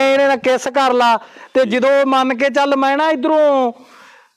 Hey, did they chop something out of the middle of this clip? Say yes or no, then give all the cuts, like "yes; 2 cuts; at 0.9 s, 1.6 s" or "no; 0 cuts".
no; 0 cuts